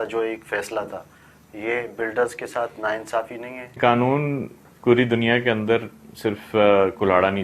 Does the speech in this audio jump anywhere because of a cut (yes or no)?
yes